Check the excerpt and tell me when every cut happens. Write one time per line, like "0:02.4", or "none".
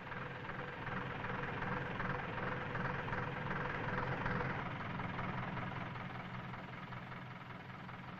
none